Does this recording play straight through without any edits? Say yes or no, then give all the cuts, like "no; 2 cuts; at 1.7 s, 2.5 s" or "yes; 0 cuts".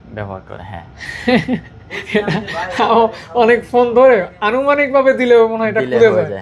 yes; 0 cuts